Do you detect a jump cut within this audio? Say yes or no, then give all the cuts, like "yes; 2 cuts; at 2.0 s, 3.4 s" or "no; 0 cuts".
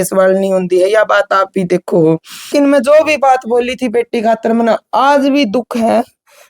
yes; 1 cut; at 2.5 s